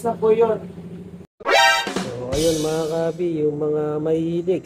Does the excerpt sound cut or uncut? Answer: cut